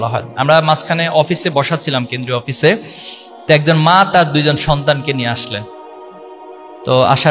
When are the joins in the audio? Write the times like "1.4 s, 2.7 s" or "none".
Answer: none